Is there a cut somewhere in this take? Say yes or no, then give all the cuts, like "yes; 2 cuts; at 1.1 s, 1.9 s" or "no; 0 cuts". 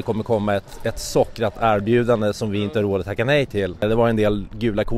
yes; 1 cut; at 3.8 s